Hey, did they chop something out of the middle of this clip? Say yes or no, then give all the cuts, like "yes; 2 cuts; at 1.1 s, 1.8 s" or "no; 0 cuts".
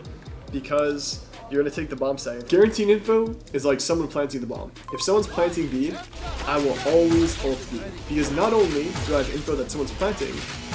yes; 1 cut; at 2.4 s